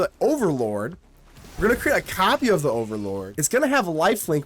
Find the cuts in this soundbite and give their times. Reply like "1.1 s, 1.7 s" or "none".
3.3 s